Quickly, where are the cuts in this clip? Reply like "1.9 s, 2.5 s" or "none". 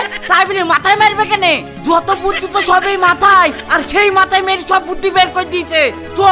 none